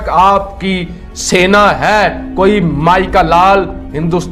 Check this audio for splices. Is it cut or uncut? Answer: uncut